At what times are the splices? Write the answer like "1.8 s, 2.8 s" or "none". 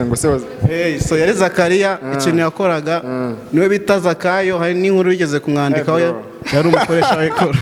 none